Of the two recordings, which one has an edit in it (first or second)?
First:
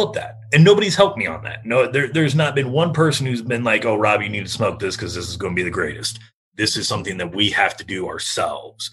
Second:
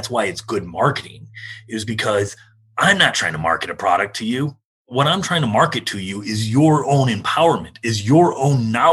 second